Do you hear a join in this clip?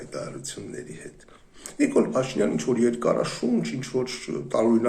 no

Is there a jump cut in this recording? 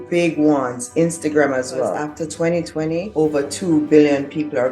yes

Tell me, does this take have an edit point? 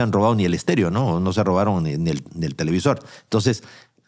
no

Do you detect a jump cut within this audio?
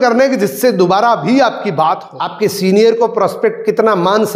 yes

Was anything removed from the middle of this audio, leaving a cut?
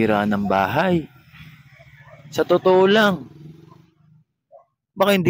no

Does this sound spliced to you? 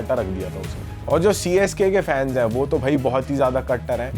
yes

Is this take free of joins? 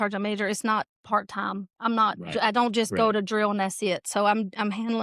yes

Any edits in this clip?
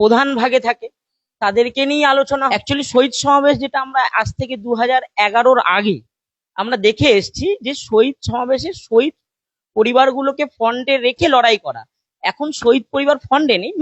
yes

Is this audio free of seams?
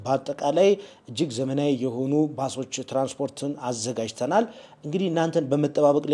yes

